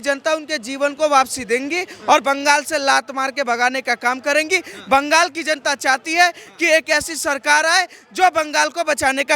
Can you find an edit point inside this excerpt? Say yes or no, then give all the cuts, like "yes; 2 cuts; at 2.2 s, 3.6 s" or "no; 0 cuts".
no; 0 cuts